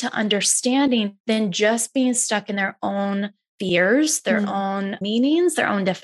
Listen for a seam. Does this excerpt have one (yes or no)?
yes